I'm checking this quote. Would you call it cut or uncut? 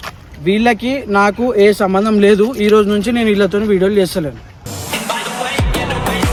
uncut